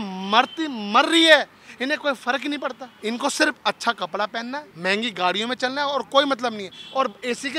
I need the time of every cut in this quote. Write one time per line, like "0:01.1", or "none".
0:02.9
0:04.7